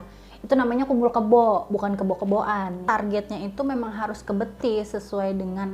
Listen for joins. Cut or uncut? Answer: cut